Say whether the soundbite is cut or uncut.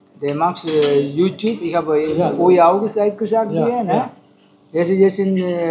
uncut